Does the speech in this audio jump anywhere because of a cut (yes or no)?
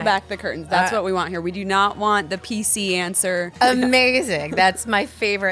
yes